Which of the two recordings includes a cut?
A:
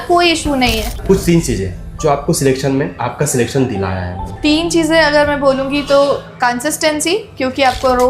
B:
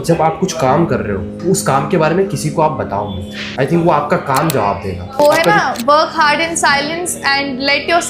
A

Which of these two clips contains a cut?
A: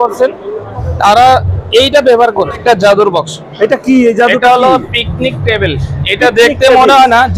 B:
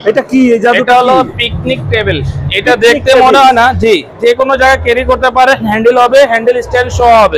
A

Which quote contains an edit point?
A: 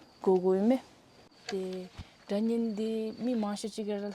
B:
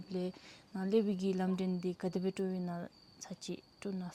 A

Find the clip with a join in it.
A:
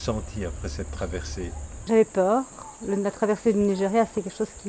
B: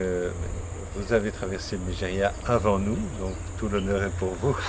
A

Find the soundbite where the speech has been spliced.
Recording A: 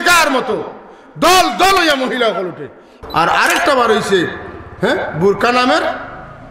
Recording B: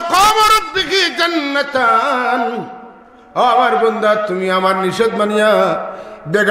A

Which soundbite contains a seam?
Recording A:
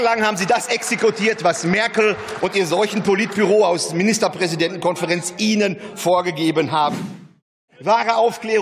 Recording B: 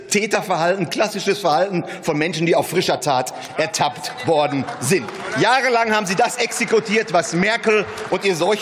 A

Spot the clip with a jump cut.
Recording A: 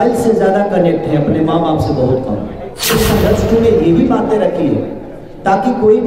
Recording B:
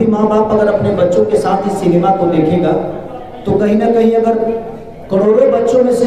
A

